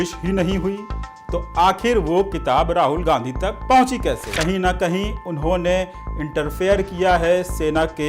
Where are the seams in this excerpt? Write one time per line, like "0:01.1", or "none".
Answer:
0:04.3